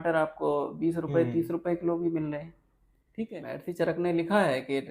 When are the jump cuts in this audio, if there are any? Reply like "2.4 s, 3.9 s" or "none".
3.3 s